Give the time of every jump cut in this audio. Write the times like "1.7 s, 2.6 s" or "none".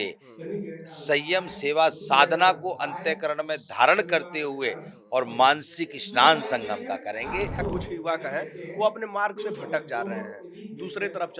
7.6 s